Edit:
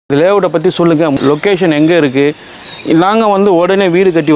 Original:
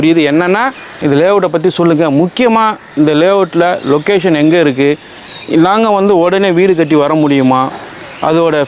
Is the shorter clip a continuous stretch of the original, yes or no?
no